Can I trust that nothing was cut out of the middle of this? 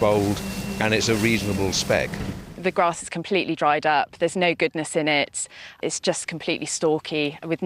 no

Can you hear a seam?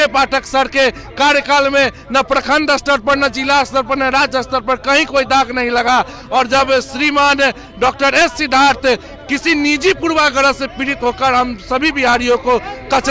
no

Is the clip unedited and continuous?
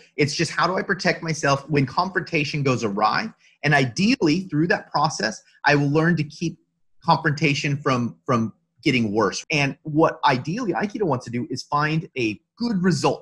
no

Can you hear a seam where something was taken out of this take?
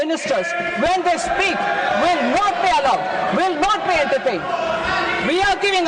no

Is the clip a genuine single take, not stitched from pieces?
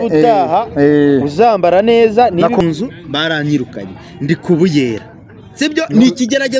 no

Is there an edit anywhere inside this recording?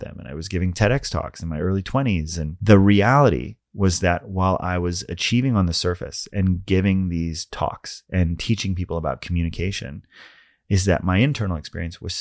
yes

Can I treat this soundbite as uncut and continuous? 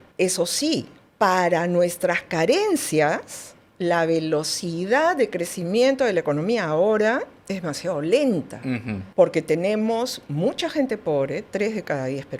yes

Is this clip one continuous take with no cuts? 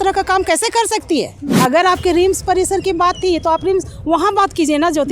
no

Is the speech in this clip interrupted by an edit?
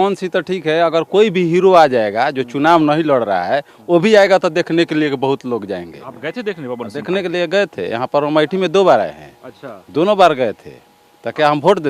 no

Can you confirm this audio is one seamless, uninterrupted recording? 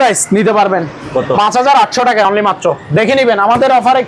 yes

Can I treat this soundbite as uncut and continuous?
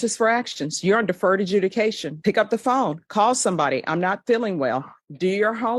yes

